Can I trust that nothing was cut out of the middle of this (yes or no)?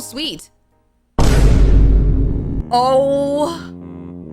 no